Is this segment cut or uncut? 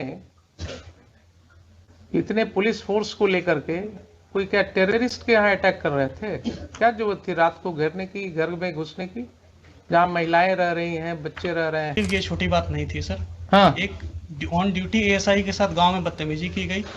cut